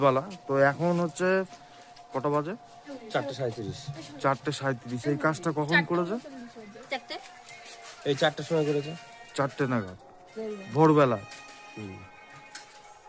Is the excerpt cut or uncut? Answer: uncut